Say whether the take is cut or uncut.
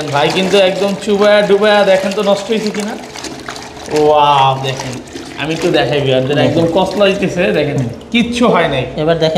uncut